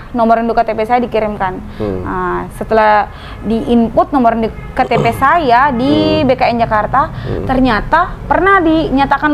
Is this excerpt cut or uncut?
uncut